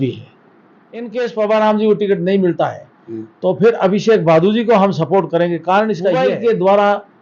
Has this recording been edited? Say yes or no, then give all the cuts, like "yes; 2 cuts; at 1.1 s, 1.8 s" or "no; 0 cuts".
yes; 2 cuts; at 1.1 s, 6.2 s